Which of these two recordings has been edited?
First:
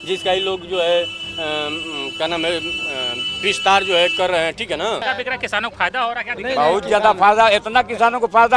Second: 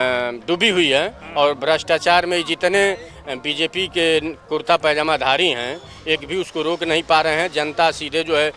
first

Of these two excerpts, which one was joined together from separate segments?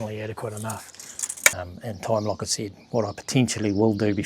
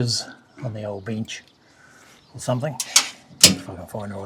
first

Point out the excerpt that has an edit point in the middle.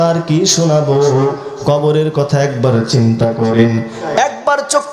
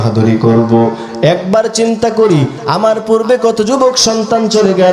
first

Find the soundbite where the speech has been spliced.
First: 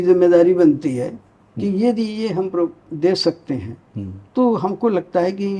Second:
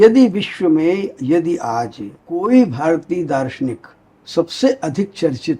second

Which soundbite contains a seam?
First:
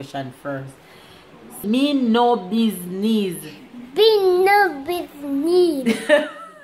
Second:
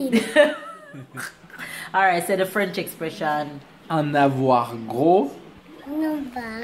first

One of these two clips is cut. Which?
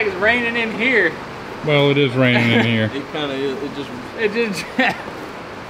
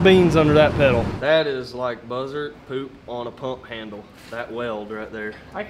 second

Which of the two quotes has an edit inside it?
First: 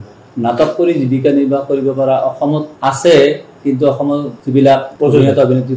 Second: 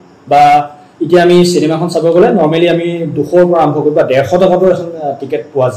first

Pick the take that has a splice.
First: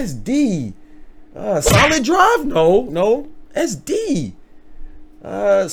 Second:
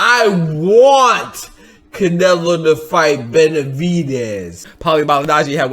second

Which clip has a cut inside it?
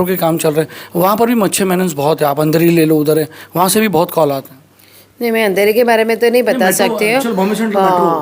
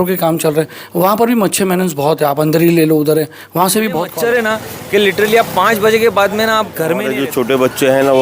second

